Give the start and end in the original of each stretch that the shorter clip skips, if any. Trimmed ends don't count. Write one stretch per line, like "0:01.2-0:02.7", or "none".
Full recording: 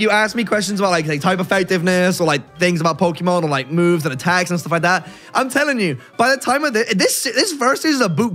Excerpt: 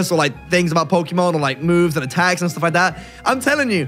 none